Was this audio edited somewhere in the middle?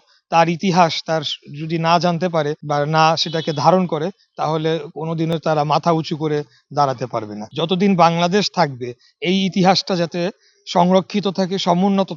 yes; 2 cuts; at 2.6 s, 7.4 s

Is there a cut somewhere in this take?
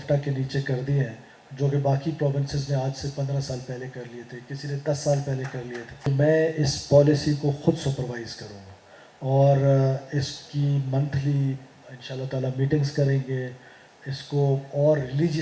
yes; 1 cut; at 6.0 s

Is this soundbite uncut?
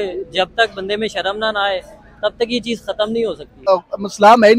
no; 1 cut; at 3.7 s

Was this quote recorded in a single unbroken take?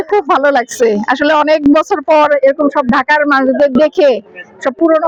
yes; 0 cuts

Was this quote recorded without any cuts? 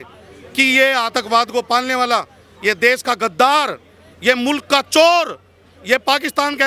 yes; 0 cuts

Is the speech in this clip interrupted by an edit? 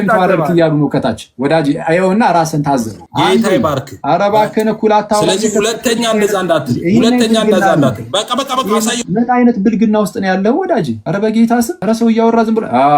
yes; 3 cuts; at 3.0 s, 11.0 s, 11.8 s

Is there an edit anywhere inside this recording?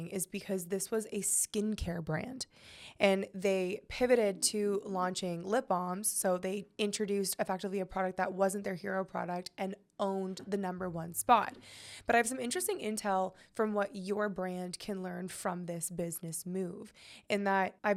no; 0 cuts

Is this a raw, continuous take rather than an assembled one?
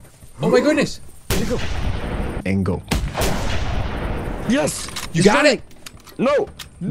no; 1 cut; at 2.4 s

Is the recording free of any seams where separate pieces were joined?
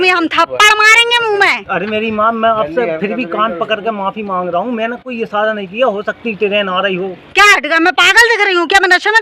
yes; 0 cuts

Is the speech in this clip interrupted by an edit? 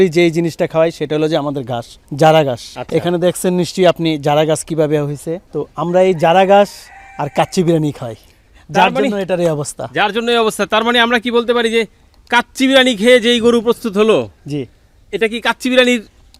no; 0 cuts

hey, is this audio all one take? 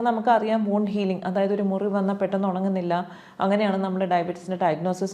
yes; 0 cuts

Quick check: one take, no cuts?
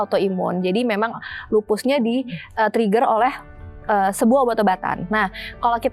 yes; 0 cuts

